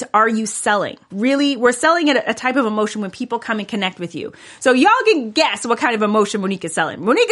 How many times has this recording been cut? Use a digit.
1